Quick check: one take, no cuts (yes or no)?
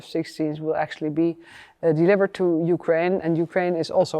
no